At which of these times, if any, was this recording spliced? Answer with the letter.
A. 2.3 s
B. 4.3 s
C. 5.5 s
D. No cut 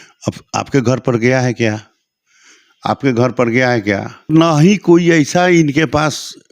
B